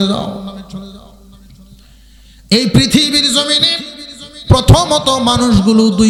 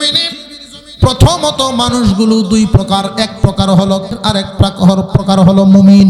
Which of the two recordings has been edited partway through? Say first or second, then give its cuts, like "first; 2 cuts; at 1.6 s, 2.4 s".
second; 1 cut; at 4.1 s